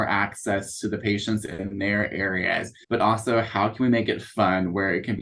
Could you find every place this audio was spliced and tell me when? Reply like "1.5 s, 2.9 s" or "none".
2.7 s